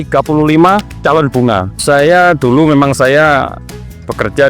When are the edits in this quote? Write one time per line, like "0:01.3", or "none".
0:01.4